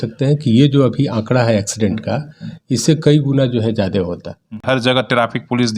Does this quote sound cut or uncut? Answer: cut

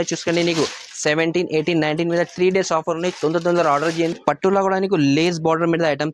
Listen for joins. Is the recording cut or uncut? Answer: cut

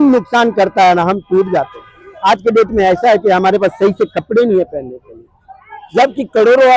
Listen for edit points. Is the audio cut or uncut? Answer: uncut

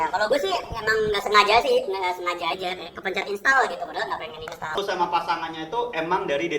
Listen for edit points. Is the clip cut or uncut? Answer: cut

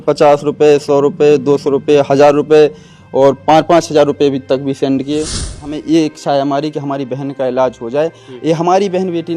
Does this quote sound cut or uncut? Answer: cut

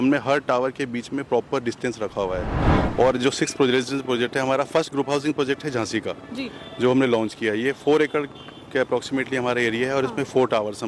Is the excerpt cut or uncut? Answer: cut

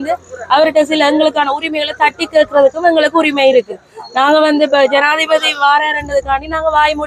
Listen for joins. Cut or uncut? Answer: uncut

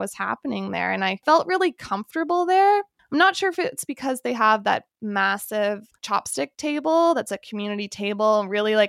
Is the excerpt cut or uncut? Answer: cut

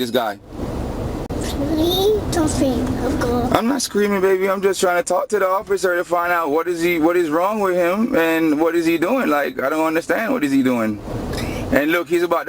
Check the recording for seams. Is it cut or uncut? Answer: cut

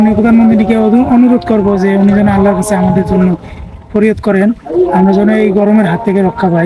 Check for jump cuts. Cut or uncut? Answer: uncut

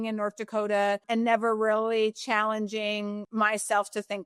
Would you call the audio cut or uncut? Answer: cut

